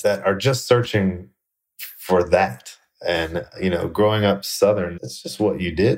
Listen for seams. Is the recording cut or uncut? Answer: uncut